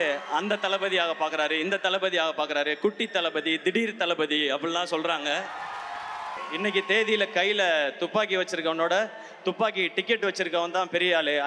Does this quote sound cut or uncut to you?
cut